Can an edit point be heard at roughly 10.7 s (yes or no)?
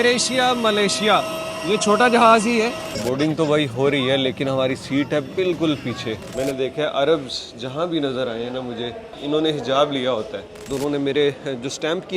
yes